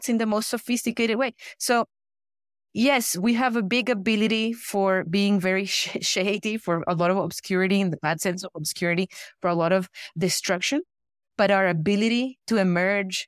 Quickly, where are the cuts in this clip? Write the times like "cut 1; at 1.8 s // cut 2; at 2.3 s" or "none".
none